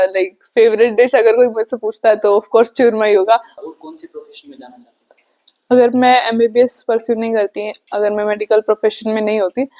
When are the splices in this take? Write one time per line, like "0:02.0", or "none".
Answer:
0:03.5